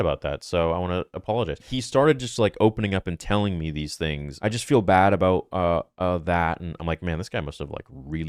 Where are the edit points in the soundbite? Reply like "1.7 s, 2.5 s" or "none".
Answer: 1.7 s, 4.3 s